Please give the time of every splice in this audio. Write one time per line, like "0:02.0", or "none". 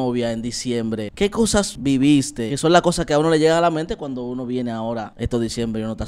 0:01.2
0:02.5
0:05.1